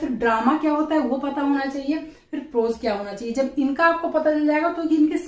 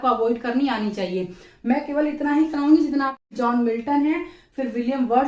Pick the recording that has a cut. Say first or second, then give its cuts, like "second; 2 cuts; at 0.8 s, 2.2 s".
second; 1 cut; at 3.2 s